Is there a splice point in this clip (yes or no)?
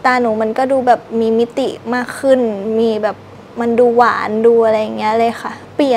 no